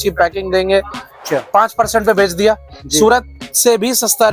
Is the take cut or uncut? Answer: cut